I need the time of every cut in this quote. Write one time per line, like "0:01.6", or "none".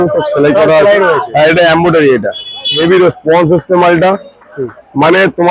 0:02.8